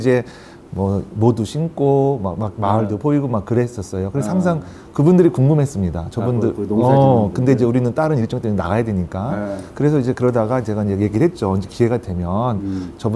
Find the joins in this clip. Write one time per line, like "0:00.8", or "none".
none